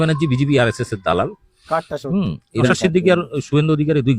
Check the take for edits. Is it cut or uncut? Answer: cut